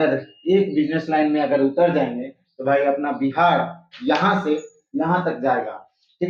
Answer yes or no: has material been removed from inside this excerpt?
no